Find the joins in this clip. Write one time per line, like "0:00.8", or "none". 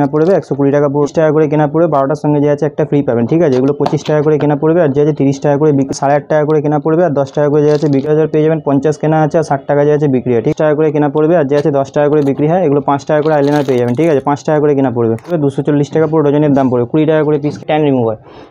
0:01.1
0:05.9
0:08.0
0:10.5
0:15.3
0:17.6